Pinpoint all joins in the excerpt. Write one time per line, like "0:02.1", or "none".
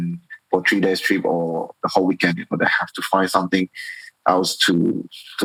none

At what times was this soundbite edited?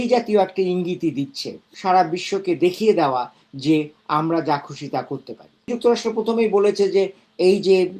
0:01.7
0:05.7

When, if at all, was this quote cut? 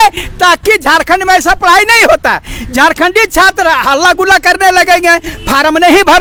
none

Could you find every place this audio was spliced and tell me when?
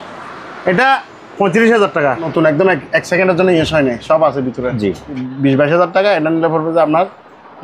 0:02.3
0:05.3

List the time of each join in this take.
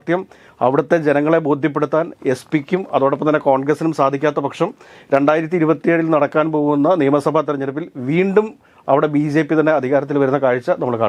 none

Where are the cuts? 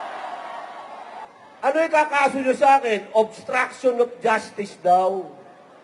0:01.3

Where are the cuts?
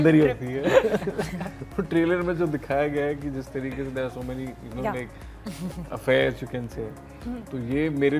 none

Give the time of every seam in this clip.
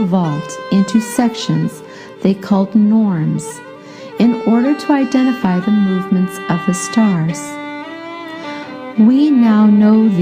none

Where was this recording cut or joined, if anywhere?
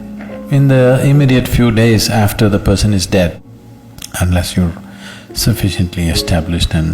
0:03.4

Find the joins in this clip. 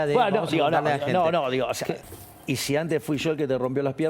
0:02.0

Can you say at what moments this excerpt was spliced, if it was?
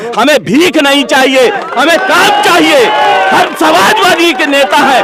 none

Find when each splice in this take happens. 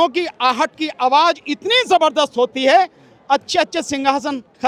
none

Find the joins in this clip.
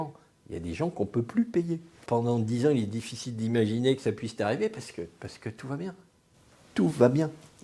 0:02.0

